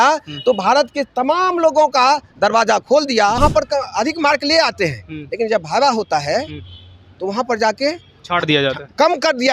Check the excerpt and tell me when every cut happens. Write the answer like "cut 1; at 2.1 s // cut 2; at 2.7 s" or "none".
cut 1; at 3.4 s